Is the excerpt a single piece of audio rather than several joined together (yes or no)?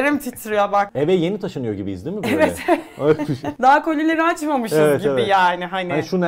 no